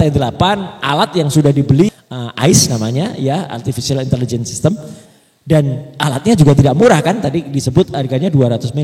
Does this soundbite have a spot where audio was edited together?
yes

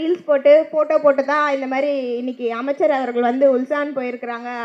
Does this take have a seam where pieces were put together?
no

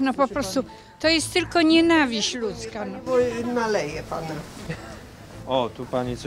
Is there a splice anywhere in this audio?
no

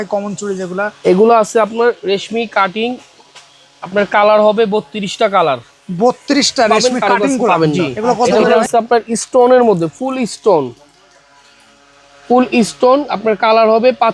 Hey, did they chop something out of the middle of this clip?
yes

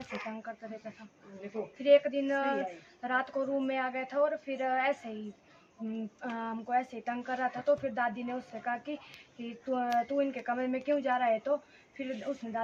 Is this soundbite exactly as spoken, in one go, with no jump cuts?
yes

